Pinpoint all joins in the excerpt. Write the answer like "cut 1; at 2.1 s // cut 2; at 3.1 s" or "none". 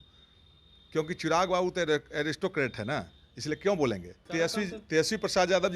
cut 1; at 4.3 s